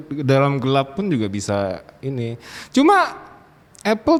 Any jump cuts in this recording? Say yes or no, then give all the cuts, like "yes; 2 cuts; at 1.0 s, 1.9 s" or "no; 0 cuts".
no; 0 cuts